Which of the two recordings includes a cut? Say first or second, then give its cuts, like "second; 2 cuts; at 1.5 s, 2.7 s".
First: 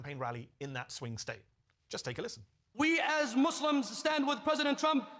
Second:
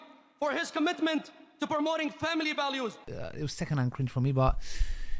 second; 1 cut; at 3.1 s